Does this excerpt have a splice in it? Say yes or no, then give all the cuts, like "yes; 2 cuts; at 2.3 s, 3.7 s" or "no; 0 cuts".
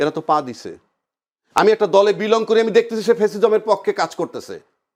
no; 0 cuts